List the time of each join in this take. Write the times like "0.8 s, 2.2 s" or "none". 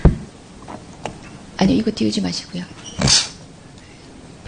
3.5 s